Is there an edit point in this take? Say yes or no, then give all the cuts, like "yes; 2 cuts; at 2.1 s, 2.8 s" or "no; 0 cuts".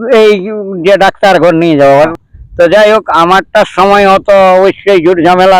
yes; 1 cut; at 2.2 s